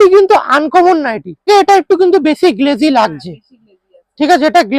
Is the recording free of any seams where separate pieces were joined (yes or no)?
no